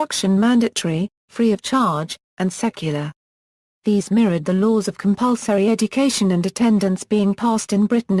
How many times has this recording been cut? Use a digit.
1